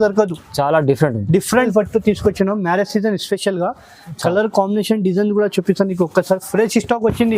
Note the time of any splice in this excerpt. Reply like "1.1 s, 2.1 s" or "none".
1.7 s